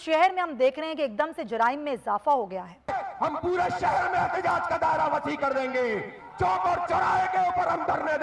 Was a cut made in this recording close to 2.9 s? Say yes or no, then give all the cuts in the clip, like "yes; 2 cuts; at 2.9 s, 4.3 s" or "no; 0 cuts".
yes; 1 cut; at 2.9 s